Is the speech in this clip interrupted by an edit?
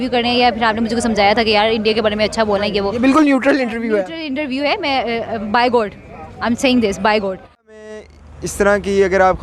yes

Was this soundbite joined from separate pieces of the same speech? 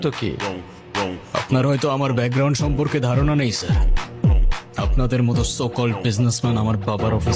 no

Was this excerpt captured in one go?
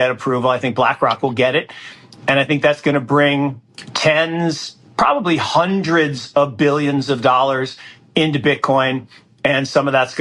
yes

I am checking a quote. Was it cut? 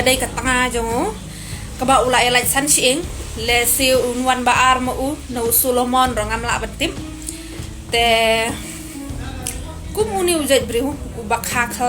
no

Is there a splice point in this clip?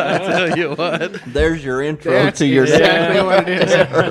no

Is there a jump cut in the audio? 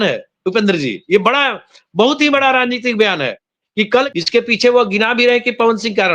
yes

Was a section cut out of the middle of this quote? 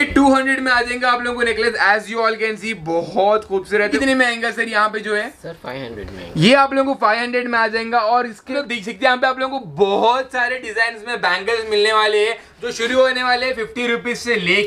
yes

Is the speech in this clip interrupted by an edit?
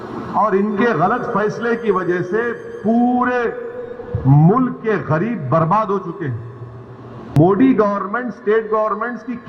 yes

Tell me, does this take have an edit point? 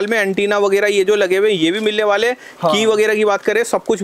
no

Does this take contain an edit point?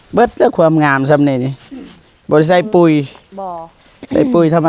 no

